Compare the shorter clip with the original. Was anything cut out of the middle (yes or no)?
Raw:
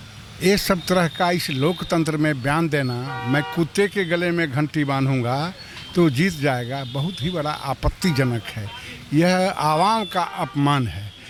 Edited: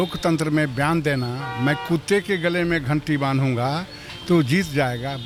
no